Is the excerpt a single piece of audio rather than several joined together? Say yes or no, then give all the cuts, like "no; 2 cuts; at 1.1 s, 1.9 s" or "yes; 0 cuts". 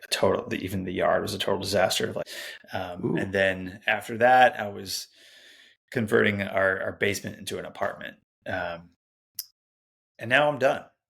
no; 1 cut; at 2.3 s